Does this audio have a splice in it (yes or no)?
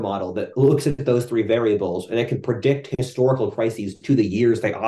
no